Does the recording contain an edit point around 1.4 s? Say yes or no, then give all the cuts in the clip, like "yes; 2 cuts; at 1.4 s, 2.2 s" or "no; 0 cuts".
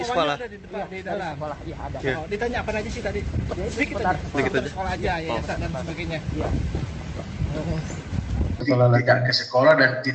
no; 1 cut; at 8.5 s